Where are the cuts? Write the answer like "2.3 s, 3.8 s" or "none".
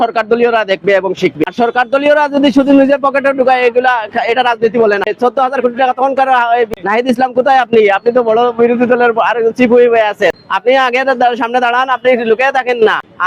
1.4 s, 5.1 s, 6.7 s, 10.4 s